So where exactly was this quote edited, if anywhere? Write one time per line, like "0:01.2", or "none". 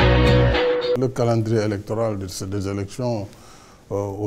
0:00.9
0:02.1

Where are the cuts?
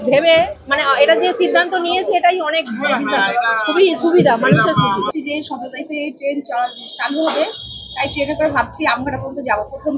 0:05.1

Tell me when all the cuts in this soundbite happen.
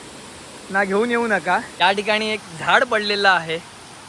0:01.7

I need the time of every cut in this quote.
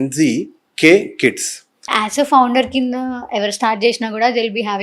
0:01.9

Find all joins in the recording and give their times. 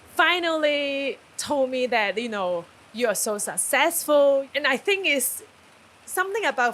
0:01.3
0:02.8
0:04.5

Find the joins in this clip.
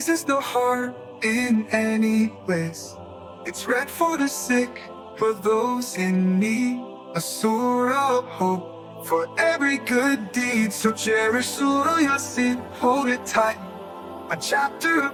none

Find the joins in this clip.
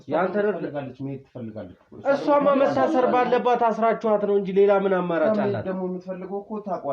none

